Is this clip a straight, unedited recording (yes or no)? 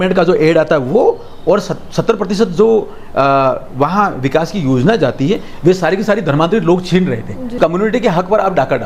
no